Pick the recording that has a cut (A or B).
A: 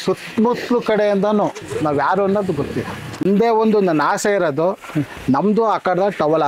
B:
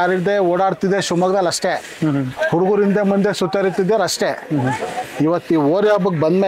A